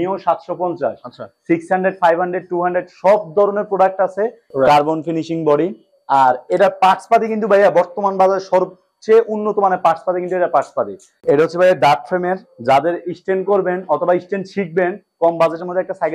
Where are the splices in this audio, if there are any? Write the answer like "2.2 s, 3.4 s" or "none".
4.4 s, 11.2 s